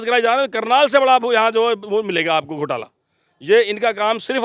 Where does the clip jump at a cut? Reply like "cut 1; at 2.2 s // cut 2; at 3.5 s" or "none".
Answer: none

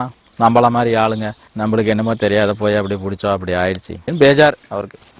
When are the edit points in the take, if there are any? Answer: none

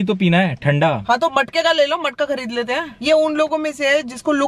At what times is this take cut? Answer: cut 1; at 1.0 s // cut 2; at 2.9 s

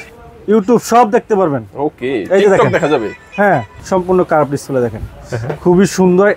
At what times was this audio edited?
cut 1; at 3.8 s

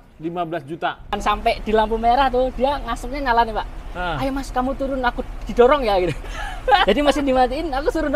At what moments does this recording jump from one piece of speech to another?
cut 1; at 1.2 s

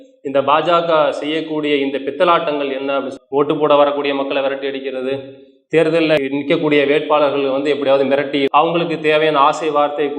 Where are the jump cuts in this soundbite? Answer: cut 1; at 3.1 s // cut 2; at 8.5 s

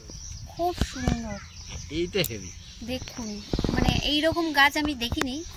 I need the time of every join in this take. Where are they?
none

